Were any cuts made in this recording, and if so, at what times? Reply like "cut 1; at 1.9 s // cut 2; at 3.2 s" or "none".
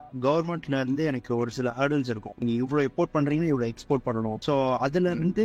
cut 1; at 2.4 s // cut 2; at 4.4 s

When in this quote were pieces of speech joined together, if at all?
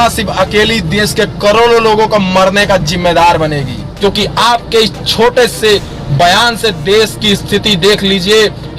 cut 1; at 3.8 s

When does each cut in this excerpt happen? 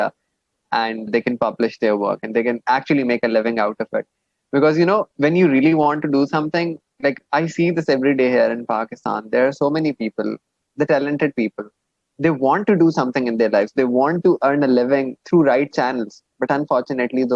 cut 1; at 1.1 s // cut 2; at 5.1 s // cut 3; at 15.2 s

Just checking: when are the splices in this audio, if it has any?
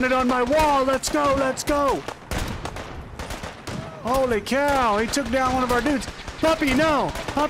none

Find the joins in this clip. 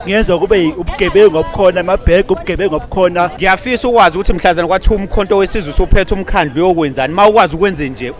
cut 1; at 3.4 s

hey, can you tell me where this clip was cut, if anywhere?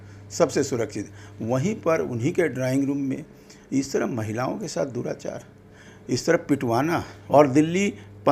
cut 1; at 7.1 s

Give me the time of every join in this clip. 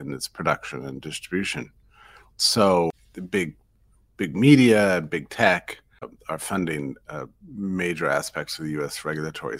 cut 1; at 2.9 s // cut 2; at 6.1 s

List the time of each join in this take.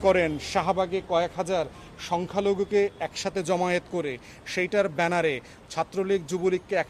none

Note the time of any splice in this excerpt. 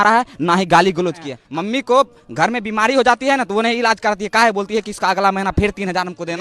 cut 1; at 1.3 s

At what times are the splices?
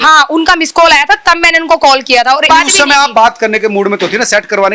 cut 1; at 2.5 s

